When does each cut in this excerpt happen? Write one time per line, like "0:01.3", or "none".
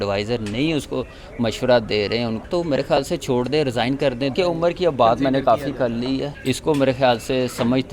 0:02.4
0:04.3
0:06.3